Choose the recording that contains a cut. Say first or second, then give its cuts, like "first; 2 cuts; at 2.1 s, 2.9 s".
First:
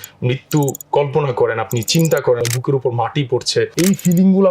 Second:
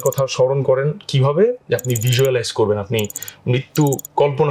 first; 2 cuts; at 2.4 s, 3.7 s